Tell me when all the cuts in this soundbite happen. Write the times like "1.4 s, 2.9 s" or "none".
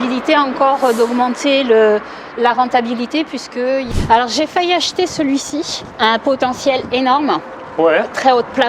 3.9 s, 5.8 s